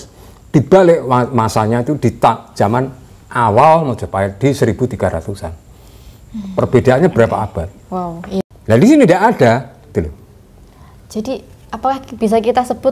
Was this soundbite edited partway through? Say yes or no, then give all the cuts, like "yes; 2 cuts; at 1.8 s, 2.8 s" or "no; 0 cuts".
yes; 1 cut; at 8.4 s